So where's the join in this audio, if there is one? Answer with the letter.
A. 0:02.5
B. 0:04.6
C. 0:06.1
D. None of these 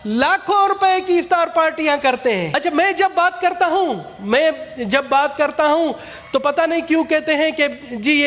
A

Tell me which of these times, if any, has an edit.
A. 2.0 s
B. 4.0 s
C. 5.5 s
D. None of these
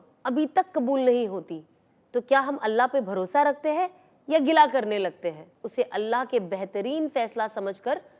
C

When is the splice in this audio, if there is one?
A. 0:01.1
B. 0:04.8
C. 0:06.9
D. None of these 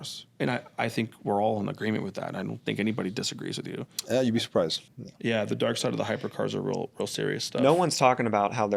B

